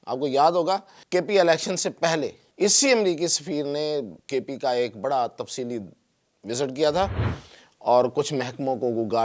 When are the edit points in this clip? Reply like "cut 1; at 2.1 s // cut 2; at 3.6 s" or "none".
cut 1; at 0.9 s // cut 2; at 2.4 s // cut 3; at 4.2 s